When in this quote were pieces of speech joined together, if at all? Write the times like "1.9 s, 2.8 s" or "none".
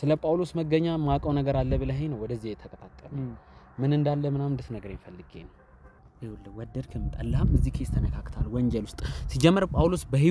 6.0 s